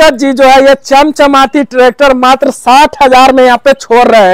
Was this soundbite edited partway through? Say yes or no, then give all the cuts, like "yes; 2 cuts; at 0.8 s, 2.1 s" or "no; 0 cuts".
no; 0 cuts